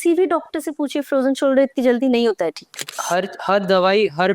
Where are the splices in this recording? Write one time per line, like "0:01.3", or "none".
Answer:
0:03.0